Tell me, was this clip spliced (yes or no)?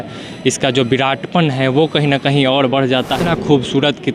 yes